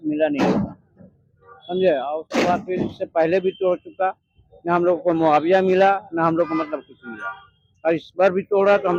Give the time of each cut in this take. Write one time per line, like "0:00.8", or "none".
none